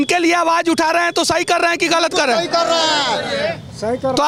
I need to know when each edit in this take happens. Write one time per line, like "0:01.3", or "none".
none